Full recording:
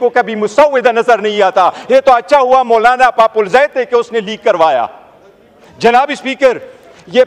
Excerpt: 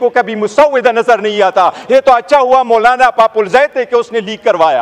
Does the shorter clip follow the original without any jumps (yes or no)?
yes